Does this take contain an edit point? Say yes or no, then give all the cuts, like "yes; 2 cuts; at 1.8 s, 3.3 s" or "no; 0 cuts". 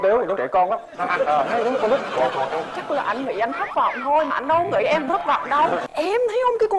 yes; 1 cut; at 5.9 s